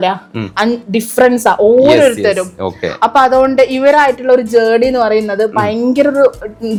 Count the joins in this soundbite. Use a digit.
0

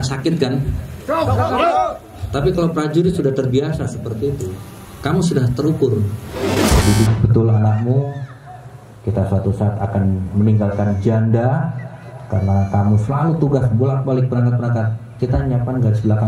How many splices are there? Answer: 1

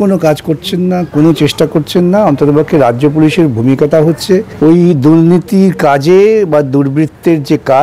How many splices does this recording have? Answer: 1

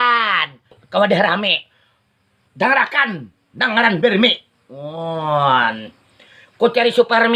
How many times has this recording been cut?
0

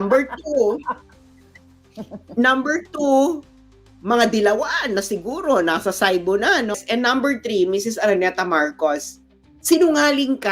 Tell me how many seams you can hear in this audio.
1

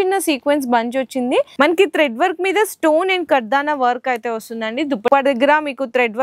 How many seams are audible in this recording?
2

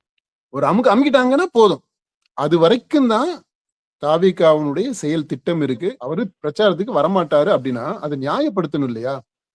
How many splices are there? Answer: 1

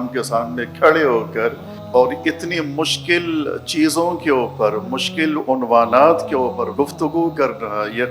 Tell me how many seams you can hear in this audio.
0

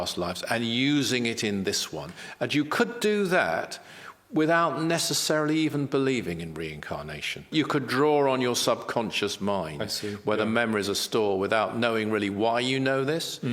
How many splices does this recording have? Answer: 1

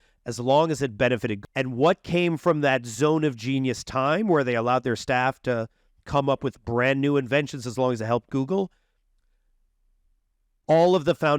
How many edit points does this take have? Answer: 1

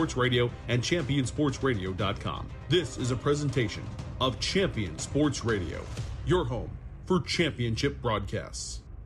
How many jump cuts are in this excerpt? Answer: 0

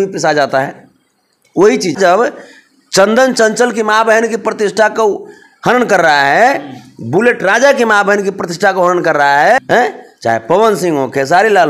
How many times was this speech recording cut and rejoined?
2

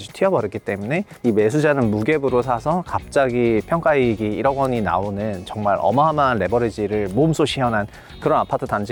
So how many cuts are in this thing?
0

